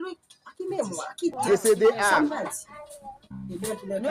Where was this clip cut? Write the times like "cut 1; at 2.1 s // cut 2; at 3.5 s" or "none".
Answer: cut 1; at 1.3 s